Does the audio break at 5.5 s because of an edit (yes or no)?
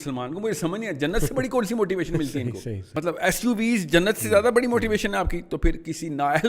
no